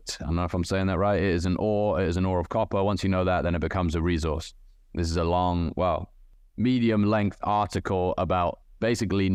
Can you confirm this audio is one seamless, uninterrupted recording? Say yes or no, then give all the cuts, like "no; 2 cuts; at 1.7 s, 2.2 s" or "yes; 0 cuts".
yes; 0 cuts